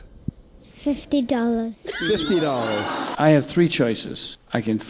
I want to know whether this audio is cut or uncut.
cut